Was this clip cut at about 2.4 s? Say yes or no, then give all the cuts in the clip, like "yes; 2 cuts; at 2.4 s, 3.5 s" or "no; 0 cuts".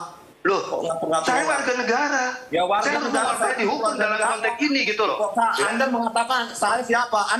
no; 0 cuts